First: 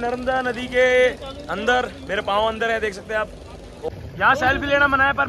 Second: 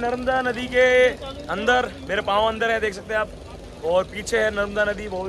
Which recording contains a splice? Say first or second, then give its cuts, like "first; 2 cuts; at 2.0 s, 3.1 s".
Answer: first; 1 cut; at 3.9 s